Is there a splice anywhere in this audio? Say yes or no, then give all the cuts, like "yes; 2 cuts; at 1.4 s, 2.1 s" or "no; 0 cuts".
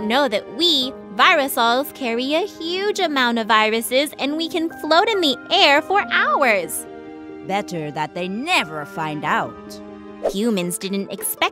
yes; 1 cut; at 10.2 s